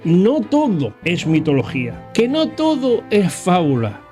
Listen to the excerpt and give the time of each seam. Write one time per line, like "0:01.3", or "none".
0:01.0
0:02.0